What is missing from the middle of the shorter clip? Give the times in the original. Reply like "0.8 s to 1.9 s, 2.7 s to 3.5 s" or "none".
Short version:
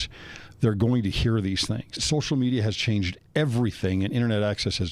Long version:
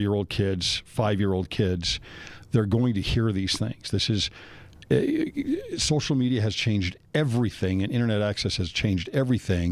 3.8 s to 5.7 s